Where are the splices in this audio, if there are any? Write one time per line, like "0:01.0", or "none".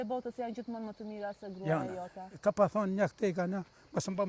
none